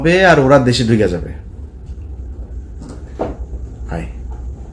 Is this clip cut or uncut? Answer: uncut